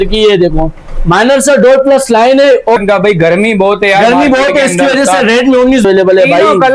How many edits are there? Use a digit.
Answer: 2